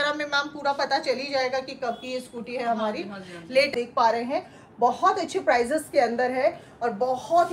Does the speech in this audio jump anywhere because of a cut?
yes; 1 cut; at 3.7 s

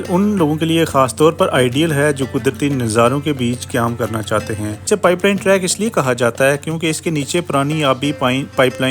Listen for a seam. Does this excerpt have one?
yes; 1 cut; at 4.9 s

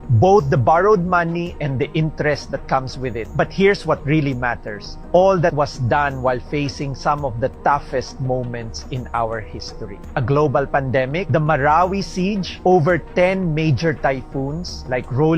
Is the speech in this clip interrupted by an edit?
yes; 2 cuts; at 10.0 s, 12.5 s

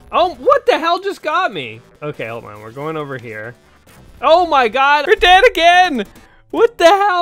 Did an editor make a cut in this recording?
yes; 2 cuts; at 1.9 s, 5.0 s

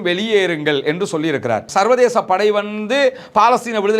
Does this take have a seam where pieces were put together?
yes; 1 cut; at 1.7 s

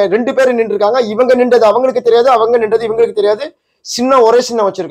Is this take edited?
no; 0 cuts

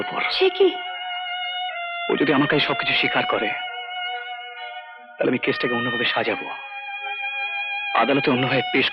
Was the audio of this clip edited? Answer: no; 0 cuts

